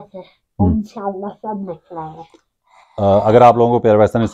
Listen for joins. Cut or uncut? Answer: uncut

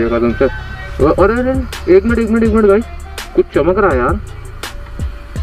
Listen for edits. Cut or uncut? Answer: uncut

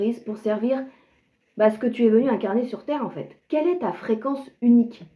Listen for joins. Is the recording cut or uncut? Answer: uncut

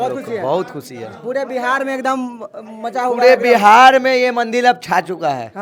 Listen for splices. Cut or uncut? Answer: uncut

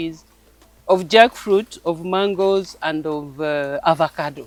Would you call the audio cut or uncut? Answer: uncut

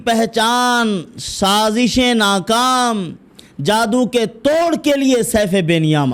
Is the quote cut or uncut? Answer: uncut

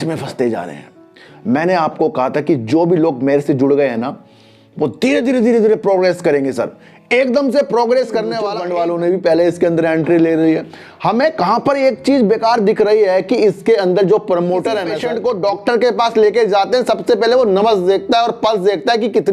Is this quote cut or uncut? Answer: cut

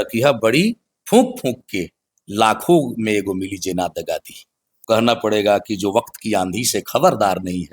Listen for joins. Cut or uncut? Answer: cut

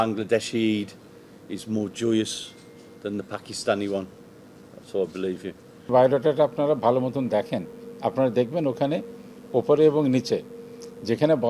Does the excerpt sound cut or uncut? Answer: cut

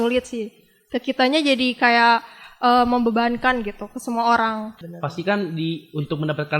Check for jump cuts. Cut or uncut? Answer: cut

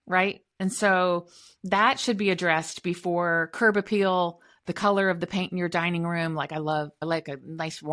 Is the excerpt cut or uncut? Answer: cut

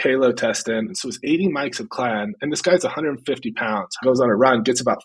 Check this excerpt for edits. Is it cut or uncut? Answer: cut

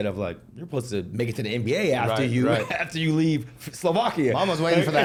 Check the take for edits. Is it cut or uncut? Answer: uncut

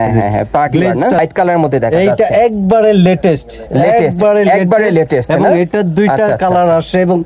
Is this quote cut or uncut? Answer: cut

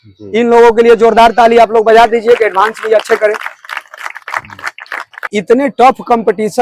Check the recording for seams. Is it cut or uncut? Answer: cut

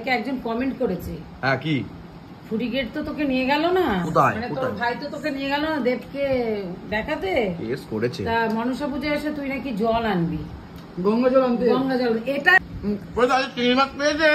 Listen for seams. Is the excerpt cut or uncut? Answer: cut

